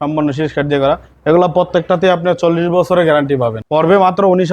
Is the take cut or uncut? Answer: cut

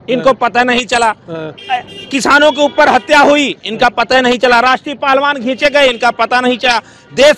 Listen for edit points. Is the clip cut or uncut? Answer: uncut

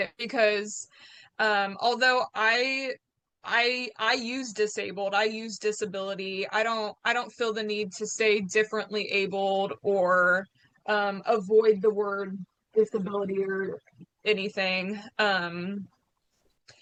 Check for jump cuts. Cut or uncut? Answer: uncut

